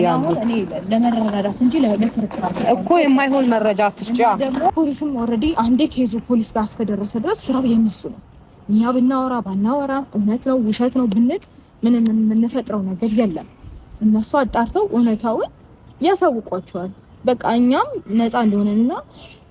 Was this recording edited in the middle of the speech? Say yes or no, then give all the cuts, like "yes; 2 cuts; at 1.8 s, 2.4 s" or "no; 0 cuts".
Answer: yes; 1 cut; at 4.7 s